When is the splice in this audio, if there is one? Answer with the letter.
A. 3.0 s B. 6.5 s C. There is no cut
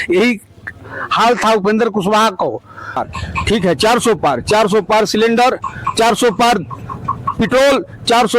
A